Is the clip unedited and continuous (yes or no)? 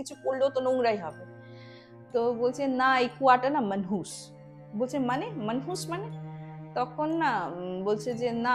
yes